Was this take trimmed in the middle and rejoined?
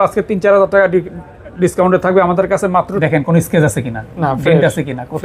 yes; 1 cut; at 2.9 s

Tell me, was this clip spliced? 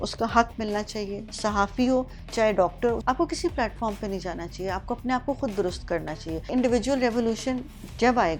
yes; 2 cuts; at 3.0 s, 6.5 s

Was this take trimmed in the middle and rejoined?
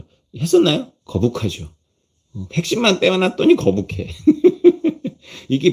yes; 1 cut; at 0.9 s

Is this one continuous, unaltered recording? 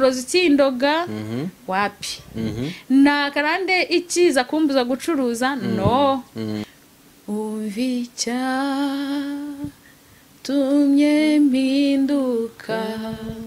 no; 1 cut; at 6.7 s

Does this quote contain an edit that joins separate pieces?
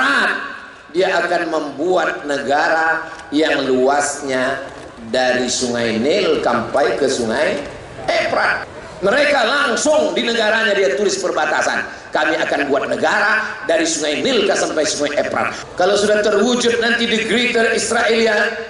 yes; 2 cuts; at 8.6 s, 15.6 s

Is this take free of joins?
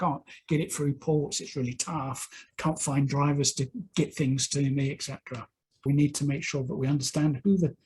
no; 1 cut; at 5.8 s

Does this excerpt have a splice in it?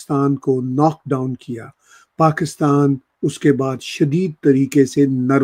no; 0 cuts

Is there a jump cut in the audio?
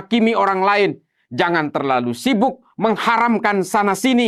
no; 0 cuts

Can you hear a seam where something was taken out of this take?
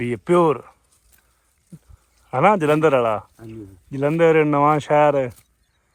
no; 0 cuts

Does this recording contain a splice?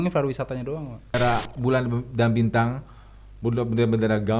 yes; 1 cut; at 1.1 s

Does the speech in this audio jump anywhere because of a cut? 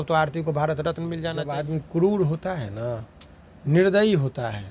yes; 1 cut; at 1.2 s

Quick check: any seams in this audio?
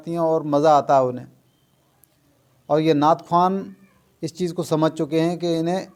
no; 0 cuts

